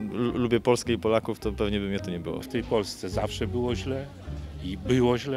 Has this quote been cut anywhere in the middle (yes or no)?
yes